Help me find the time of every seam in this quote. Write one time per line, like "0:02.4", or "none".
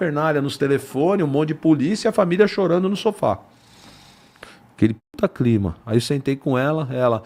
none